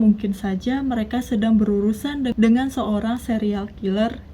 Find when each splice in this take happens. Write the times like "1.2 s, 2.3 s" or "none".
2.3 s